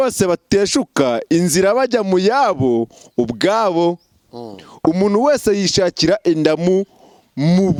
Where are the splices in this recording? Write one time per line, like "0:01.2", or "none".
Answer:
none